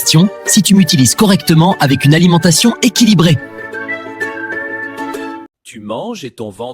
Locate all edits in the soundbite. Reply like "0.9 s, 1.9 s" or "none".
5.6 s